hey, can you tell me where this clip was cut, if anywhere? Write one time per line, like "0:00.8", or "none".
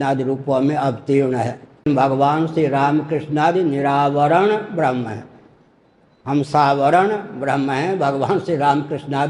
0:01.8